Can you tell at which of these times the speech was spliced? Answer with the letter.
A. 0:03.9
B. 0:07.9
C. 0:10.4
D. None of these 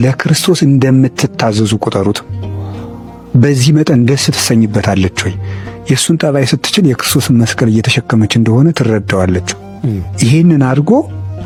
D